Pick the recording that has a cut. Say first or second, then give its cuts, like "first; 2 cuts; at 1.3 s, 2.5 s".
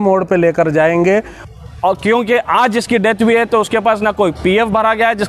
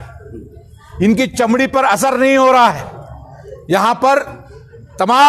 first; 1 cut; at 1.4 s